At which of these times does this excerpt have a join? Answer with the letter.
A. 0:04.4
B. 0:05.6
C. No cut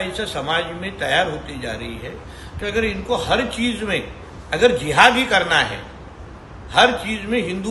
C